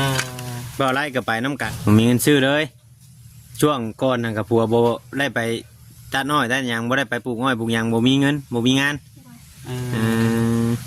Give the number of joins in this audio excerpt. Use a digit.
1